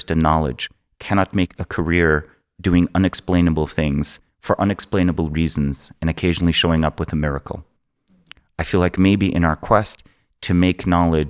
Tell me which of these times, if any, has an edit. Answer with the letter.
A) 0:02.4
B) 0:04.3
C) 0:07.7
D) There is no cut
D